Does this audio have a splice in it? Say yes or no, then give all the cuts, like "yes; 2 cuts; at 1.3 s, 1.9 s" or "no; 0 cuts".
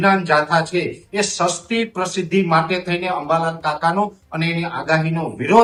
no; 0 cuts